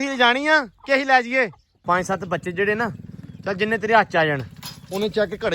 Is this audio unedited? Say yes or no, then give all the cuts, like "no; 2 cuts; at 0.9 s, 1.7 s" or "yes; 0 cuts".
no; 1 cut; at 1.7 s